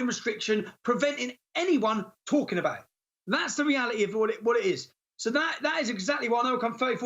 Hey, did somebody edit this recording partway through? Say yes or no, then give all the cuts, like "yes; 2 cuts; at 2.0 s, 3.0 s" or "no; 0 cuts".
no; 0 cuts